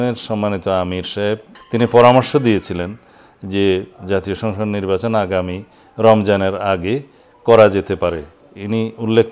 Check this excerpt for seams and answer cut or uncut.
cut